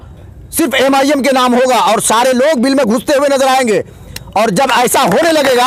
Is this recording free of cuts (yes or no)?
yes